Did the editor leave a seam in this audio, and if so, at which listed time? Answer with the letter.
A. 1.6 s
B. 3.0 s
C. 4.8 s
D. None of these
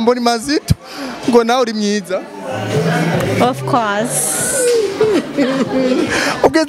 D